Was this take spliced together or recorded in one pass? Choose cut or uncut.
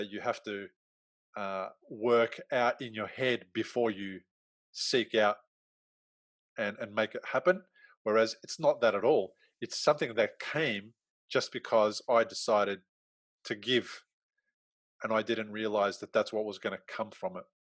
uncut